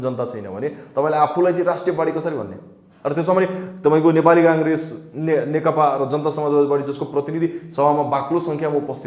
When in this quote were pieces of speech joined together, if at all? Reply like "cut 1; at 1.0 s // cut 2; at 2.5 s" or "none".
none